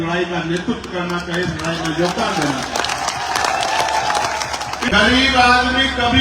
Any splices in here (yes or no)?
yes